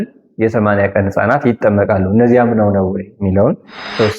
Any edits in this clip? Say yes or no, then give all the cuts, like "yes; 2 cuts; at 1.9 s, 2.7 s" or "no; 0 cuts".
no; 0 cuts